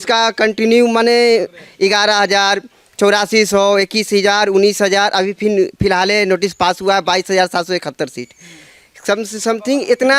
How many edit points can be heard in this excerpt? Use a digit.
0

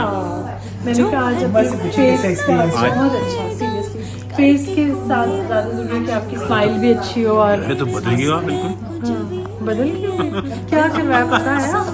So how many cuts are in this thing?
0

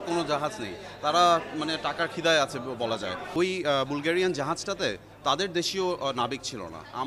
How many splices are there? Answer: 1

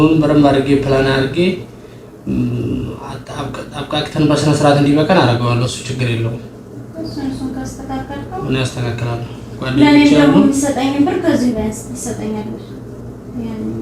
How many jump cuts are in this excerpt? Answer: 0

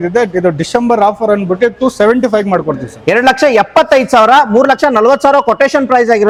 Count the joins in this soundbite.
0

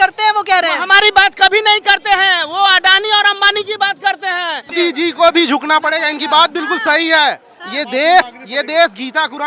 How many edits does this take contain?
1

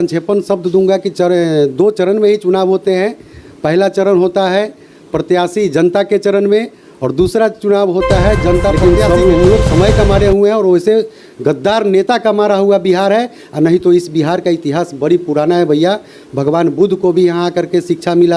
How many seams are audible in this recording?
1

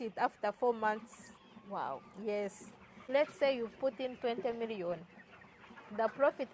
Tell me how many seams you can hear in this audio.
1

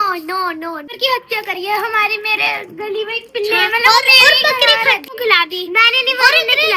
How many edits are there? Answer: 2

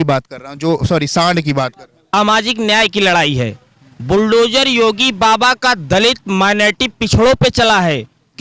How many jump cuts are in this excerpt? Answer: 1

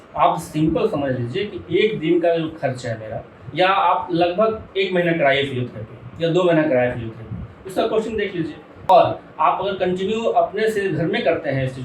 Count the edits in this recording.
1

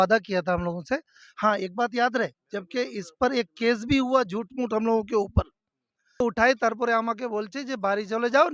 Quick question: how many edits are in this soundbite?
1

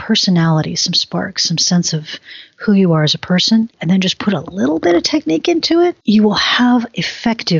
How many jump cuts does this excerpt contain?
2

